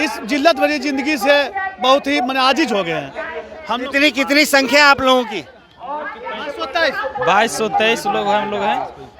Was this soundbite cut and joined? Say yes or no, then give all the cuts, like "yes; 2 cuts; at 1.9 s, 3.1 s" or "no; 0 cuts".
no; 0 cuts